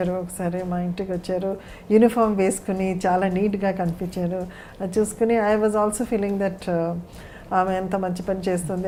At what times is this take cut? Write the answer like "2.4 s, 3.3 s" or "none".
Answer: none

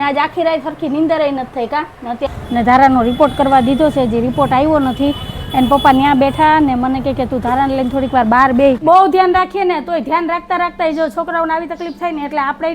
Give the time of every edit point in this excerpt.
2.3 s, 8.8 s

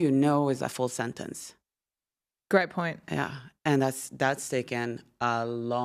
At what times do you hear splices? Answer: none

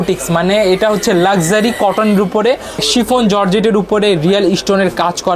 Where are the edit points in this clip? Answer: 2.8 s

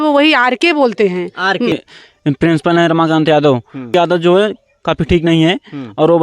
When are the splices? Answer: 1.7 s, 3.9 s

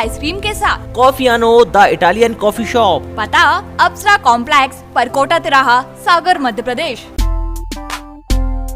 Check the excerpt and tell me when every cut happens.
7.1 s

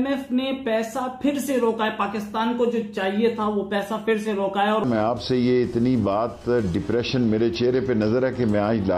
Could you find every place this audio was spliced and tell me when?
4.8 s

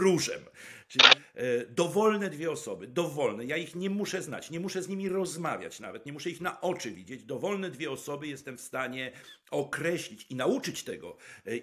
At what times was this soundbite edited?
1.1 s

